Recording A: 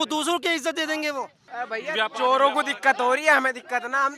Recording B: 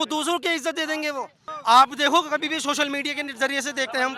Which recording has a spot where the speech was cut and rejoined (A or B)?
A